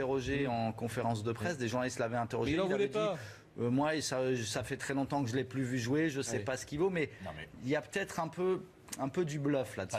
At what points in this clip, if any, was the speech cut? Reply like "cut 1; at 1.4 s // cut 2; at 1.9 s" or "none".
cut 1; at 6.5 s